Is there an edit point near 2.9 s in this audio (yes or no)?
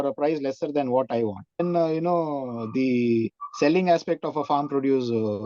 no